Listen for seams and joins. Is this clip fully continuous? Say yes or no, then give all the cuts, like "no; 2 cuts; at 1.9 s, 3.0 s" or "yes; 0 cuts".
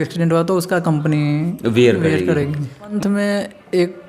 no; 1 cut; at 2.9 s